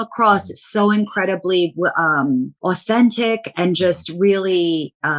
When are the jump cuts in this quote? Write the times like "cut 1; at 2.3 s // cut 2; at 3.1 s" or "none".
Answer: none

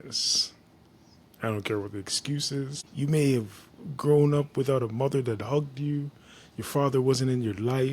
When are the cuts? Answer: cut 1; at 2.8 s

